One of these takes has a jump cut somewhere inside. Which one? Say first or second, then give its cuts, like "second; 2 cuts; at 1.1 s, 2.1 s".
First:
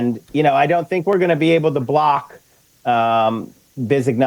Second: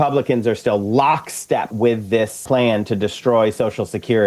second; 1 cut; at 2.1 s